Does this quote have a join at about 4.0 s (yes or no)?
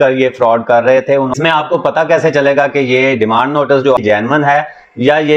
yes